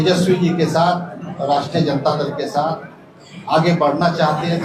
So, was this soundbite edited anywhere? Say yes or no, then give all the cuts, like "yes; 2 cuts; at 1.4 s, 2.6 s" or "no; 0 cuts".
no; 0 cuts